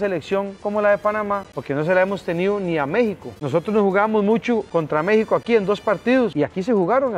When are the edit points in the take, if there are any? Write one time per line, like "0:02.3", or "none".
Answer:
0:01.5
0:03.3
0:04.7
0:06.3

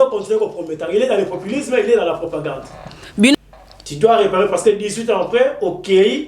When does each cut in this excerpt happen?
0:03.3

